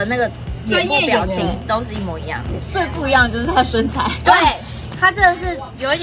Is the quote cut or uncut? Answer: cut